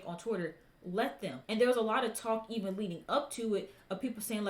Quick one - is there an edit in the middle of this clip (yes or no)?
yes